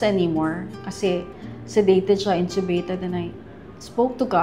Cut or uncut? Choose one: uncut